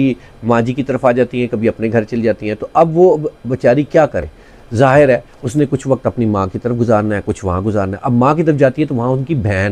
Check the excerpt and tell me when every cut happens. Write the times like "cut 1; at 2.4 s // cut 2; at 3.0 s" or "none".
none